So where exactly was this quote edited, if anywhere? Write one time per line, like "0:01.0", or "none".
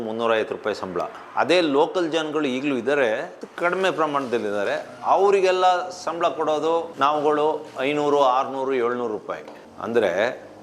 none